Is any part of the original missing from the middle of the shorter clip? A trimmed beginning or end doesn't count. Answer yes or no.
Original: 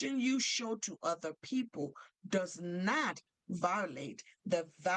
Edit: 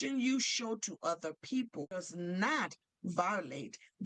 yes